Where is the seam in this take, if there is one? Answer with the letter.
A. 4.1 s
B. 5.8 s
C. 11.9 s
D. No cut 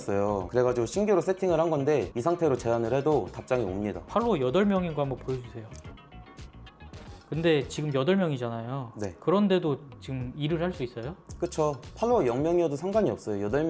D